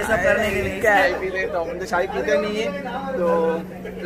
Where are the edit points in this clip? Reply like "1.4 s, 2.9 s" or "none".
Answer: 1.1 s